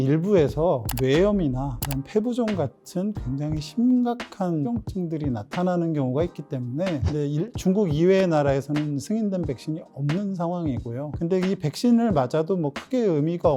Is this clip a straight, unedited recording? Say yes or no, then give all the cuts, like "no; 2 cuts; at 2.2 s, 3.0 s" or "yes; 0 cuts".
no; 1 cut; at 7.0 s